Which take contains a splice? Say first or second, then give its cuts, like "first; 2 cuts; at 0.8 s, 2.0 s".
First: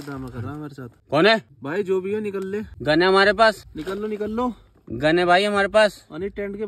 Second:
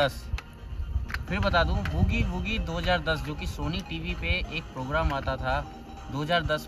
first; 4 cuts; at 1.0 s, 1.6 s, 2.7 s, 3.7 s